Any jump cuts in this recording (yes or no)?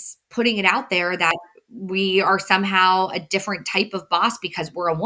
yes